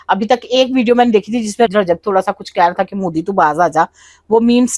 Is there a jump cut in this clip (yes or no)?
yes